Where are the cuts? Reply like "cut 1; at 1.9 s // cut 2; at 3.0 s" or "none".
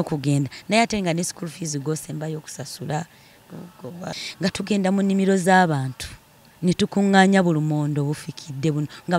cut 1; at 4.2 s